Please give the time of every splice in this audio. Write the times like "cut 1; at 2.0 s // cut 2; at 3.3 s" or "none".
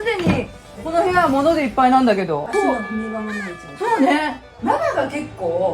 cut 1; at 4.5 s